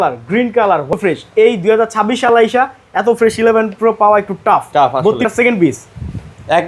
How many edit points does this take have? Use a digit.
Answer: 2